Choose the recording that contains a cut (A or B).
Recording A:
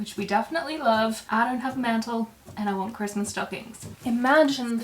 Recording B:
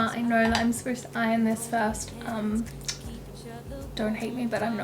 A